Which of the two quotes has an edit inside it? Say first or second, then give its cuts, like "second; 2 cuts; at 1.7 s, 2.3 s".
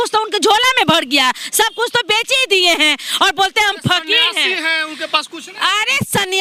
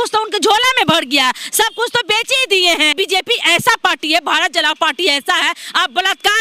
second; 1 cut; at 2.9 s